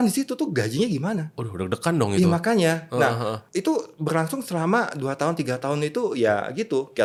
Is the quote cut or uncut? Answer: uncut